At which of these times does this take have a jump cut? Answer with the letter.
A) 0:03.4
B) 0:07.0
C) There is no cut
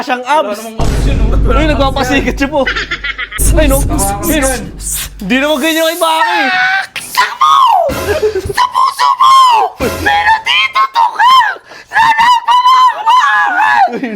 A